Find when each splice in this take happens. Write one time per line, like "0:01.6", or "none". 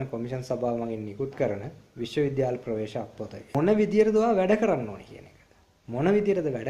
0:03.3